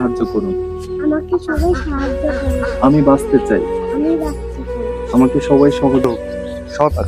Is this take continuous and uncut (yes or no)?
no